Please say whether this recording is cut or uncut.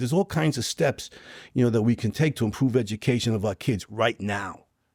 uncut